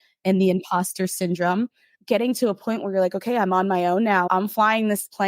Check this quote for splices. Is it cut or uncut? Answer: cut